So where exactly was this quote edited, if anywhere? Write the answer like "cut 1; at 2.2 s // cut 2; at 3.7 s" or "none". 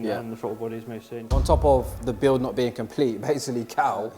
cut 1; at 1.2 s